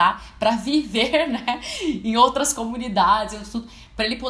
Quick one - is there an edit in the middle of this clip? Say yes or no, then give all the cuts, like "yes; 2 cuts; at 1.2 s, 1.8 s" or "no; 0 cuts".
no; 0 cuts